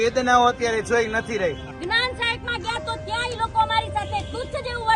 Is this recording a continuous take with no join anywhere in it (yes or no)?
no